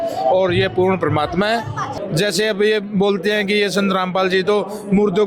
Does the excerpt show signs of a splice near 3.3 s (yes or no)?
no